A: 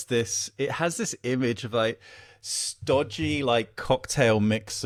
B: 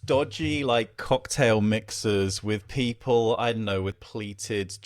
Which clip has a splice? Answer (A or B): B